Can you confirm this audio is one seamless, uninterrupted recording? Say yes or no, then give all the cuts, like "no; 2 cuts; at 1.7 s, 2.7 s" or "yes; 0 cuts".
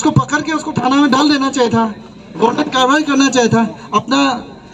yes; 0 cuts